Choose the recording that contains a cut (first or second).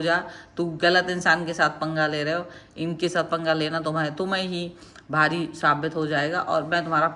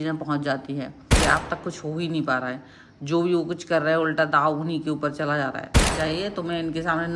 second